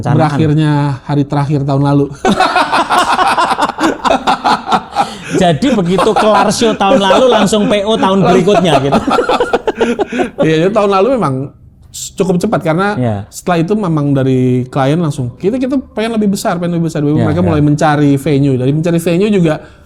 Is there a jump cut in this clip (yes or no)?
no